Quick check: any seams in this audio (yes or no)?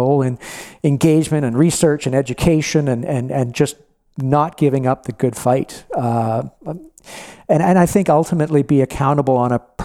no